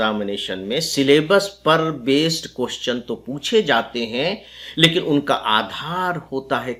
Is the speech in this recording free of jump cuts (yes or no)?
yes